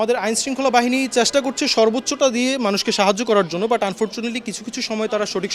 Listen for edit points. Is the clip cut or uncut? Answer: uncut